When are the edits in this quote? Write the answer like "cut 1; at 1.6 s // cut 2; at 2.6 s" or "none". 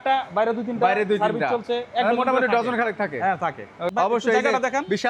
cut 1; at 3.9 s